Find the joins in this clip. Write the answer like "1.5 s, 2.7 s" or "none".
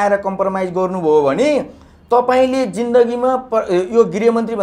none